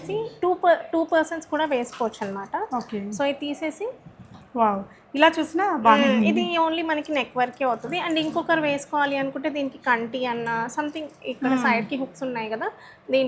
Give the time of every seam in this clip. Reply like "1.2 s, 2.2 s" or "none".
none